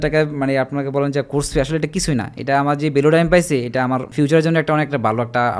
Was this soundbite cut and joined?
yes; 1 cut; at 4.1 s

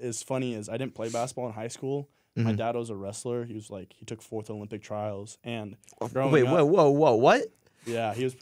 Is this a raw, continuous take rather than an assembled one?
yes; 0 cuts

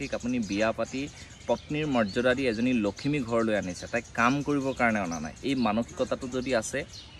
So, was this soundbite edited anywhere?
no; 0 cuts

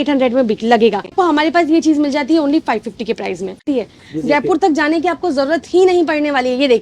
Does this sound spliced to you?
yes; 2 cuts; at 1.1 s, 3.6 s

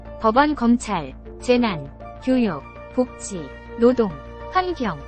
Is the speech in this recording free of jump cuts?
no; 1 cut; at 1.2 s

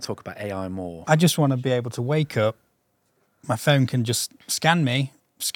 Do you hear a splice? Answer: yes; 1 cut; at 1.1 s

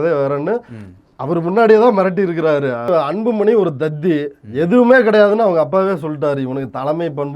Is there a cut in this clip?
yes; 1 cut; at 2.9 s

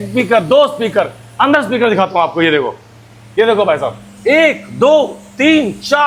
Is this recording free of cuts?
yes; 0 cuts

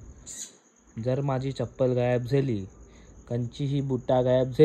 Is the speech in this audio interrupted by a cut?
no; 0 cuts

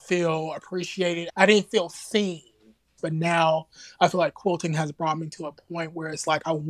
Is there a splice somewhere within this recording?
yes; 2 cuts; at 1.3 s, 3.0 s

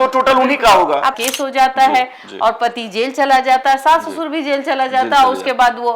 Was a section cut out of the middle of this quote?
yes; 1 cut; at 1.2 s

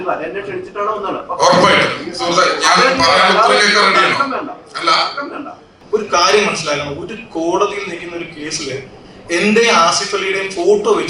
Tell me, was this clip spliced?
yes; 1 cut; at 5.7 s

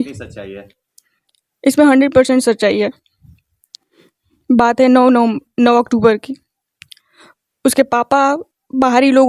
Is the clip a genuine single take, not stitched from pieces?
yes; 0 cuts

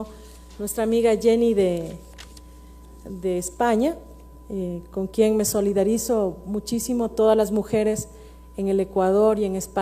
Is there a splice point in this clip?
no; 0 cuts

